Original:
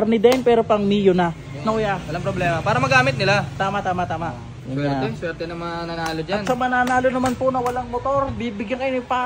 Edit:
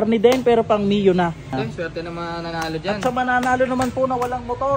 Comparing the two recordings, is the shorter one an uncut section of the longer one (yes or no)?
no